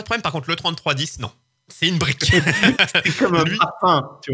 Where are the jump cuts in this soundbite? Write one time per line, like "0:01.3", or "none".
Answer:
none